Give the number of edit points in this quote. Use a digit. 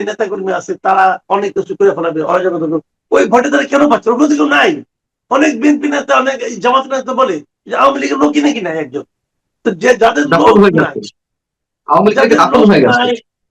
0